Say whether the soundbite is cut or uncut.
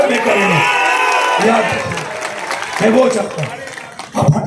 uncut